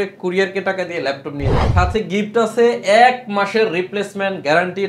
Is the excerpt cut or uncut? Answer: cut